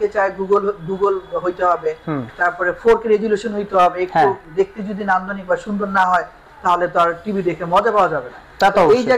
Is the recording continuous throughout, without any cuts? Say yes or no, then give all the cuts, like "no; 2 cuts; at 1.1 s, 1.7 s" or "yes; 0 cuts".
yes; 0 cuts